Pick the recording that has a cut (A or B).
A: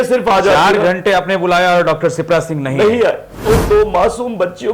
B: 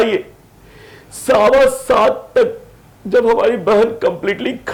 A